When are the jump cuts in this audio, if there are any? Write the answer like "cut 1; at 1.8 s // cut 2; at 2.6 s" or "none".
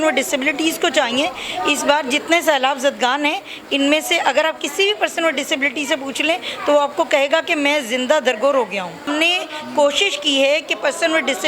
cut 1; at 9.1 s